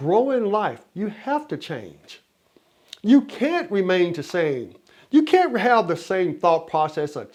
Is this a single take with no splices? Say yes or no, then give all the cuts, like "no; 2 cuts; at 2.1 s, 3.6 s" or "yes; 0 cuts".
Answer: yes; 0 cuts